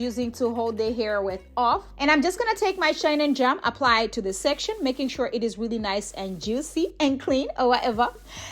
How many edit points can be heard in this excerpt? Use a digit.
1